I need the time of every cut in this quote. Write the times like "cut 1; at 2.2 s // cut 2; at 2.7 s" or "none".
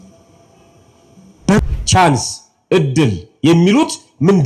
cut 1; at 1.6 s